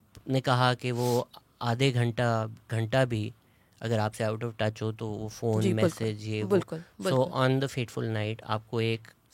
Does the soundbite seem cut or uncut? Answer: uncut